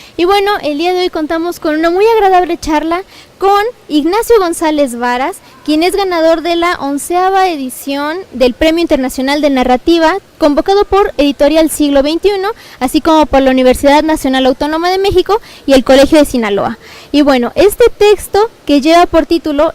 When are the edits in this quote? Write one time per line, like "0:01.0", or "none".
0:04.6